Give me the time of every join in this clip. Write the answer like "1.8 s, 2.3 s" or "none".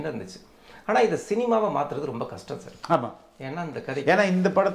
none